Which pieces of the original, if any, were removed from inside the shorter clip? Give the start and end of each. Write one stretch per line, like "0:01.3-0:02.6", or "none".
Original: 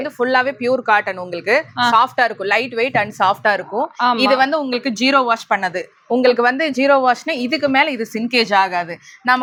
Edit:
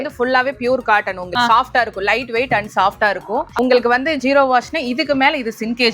0:01.3-0:01.7
0:03.9-0:06.0